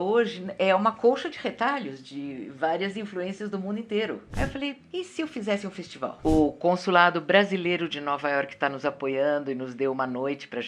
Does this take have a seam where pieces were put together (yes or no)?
yes